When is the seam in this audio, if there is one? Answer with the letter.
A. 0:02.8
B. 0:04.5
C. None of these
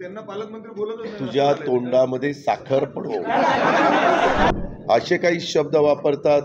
B